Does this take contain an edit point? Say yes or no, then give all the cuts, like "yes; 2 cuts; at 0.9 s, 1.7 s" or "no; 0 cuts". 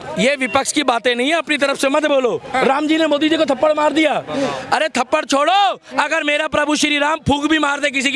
no; 0 cuts